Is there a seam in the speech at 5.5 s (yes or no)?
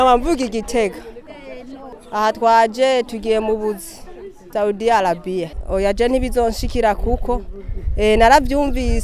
yes